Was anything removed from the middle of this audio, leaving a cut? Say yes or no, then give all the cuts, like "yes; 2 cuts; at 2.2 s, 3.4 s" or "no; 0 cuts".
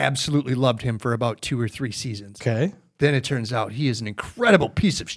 no; 0 cuts